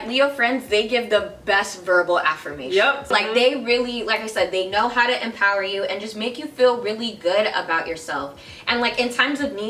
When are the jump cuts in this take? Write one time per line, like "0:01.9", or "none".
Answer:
0:03.1